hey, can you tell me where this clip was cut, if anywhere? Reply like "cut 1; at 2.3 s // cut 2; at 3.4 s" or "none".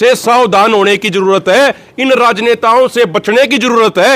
none